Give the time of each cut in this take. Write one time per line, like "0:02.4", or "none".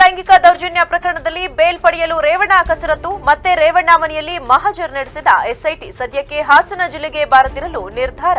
none